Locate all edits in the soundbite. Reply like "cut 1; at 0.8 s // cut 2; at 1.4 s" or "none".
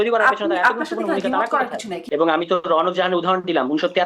cut 1; at 1.9 s

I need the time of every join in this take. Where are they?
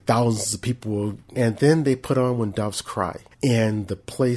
cut 1; at 1.2 s // cut 2; at 3.2 s

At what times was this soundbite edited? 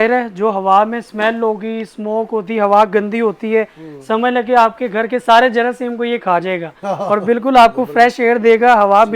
none

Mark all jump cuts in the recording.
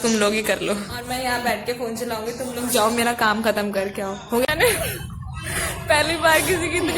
cut 1; at 1.0 s // cut 2; at 4.5 s

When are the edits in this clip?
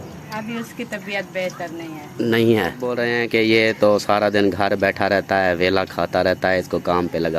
cut 1; at 3.0 s

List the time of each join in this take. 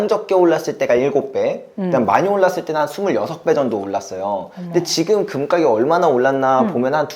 none

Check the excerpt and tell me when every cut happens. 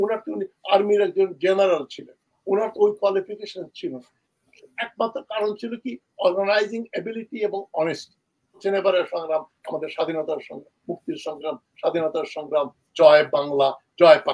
cut 1; at 8.6 s

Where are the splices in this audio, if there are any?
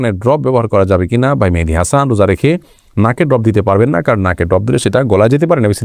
none

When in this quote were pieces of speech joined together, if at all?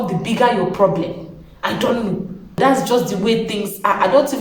cut 1; at 2.6 s

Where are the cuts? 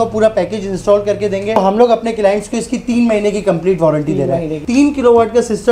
cut 1; at 1.6 s // cut 2; at 4.6 s

